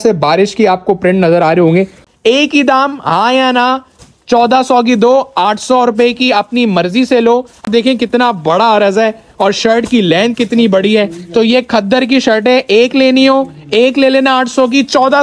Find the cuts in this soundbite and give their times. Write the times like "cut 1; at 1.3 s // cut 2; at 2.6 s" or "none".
cut 1; at 2.0 s // cut 2; at 7.7 s